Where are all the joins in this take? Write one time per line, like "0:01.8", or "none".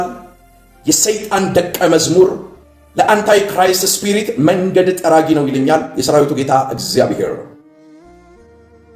none